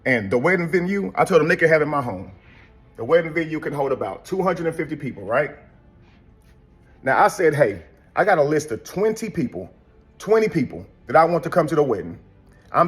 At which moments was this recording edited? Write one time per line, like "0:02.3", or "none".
none